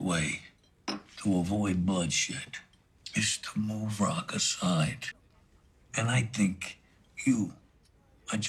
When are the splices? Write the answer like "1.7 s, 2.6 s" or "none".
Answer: none